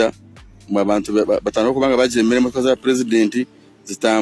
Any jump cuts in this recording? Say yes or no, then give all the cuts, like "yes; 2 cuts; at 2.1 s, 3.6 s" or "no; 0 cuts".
no; 0 cuts